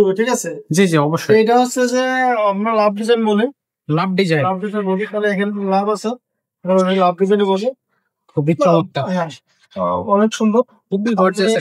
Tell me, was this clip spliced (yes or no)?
no